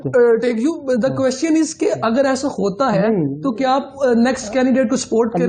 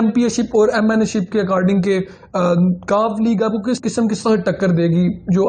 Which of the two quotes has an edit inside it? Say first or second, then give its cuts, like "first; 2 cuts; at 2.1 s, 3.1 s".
second; 1 cut; at 3.8 s